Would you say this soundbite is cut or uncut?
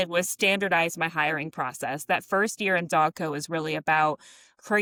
uncut